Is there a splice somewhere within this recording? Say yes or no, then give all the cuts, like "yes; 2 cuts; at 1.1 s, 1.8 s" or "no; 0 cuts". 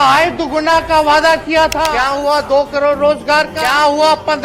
yes; 2 cuts; at 1.9 s, 3.5 s